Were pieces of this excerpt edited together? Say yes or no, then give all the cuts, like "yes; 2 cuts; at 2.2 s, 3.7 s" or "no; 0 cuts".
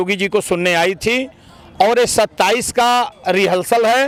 no; 0 cuts